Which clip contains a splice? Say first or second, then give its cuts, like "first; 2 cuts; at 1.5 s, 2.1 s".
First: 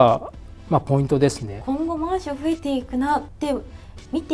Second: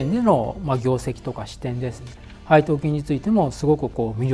first; 2 cuts; at 1.5 s, 3.3 s